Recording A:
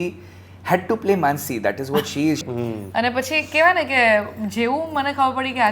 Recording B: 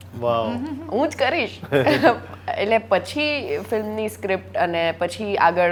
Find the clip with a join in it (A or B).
A